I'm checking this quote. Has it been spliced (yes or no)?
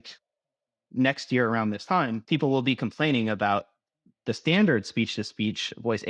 yes